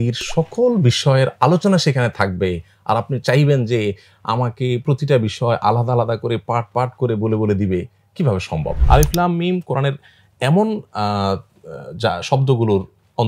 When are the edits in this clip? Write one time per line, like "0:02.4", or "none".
0:08.7

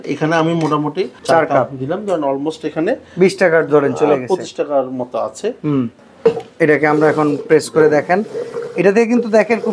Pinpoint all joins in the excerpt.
0:01.2
0:06.0

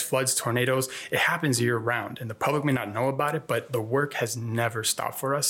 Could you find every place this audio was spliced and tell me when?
none

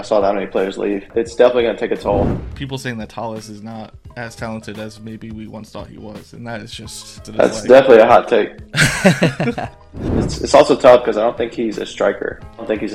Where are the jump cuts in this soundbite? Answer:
0:01.1
0:02.4
0:07.3
0:10.2

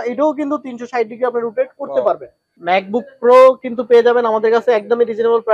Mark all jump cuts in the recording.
0:02.4

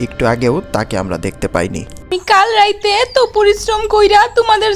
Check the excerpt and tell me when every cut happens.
0:02.1

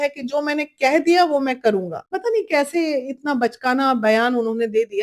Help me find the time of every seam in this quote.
0:02.0

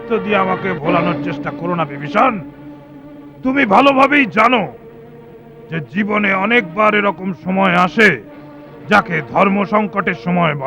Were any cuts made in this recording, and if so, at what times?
none

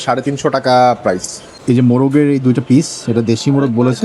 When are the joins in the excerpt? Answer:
0:01.5

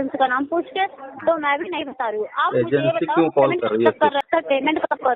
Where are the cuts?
0:04.2

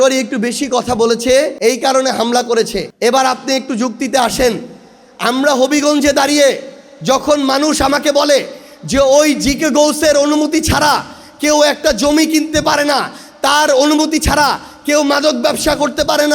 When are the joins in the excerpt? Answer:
0:01.5
0:02.8

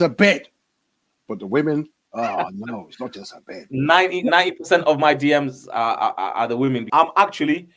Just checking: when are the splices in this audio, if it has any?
0:06.9

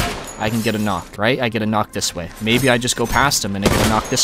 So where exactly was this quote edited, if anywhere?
0:01.1

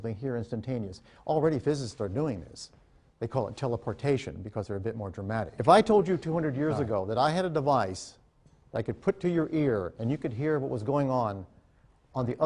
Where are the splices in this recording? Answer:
0:05.5

